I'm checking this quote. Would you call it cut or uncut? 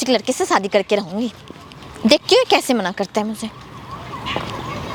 uncut